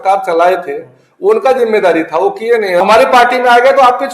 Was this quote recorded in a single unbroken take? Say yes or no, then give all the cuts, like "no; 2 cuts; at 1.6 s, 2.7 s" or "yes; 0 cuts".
no; 1 cut; at 2.8 s